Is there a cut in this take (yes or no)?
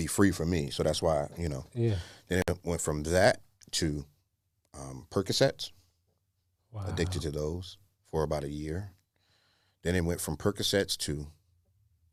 no